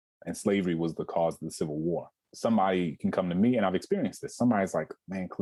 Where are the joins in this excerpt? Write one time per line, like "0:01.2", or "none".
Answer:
none